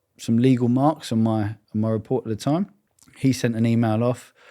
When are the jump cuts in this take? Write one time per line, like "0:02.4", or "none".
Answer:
0:02.9